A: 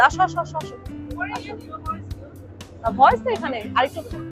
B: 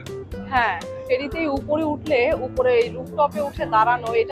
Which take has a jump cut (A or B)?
B